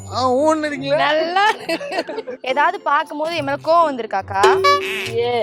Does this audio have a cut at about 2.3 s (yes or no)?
yes